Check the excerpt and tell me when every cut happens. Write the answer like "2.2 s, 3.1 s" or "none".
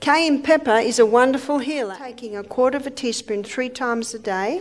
2.0 s